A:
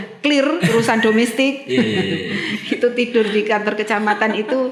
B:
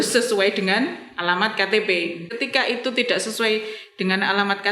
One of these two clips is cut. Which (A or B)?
B